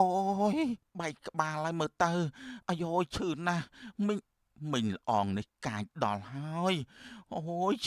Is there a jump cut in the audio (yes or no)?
no